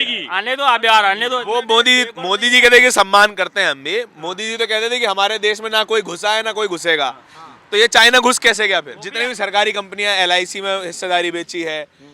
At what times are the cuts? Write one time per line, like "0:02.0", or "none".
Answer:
0:09.0